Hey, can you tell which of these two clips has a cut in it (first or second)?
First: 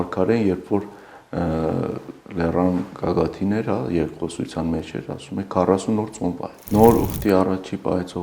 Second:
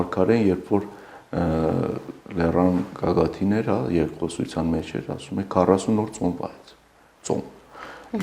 first